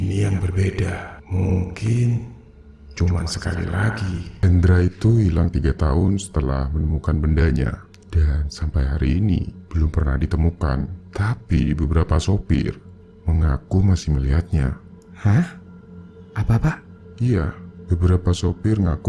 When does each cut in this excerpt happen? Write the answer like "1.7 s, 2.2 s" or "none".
4.3 s